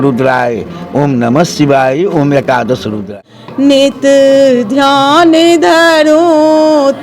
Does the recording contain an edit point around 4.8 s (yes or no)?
no